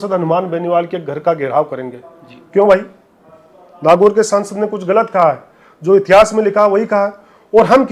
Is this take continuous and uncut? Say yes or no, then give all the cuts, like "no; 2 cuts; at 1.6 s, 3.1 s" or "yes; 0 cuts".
yes; 0 cuts